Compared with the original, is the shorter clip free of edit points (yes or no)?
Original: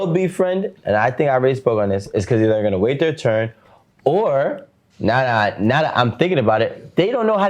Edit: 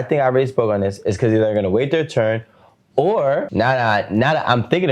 no